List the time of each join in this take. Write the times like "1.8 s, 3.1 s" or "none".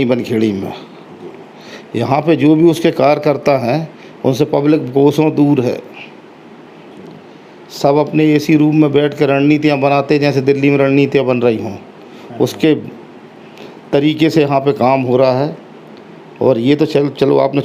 none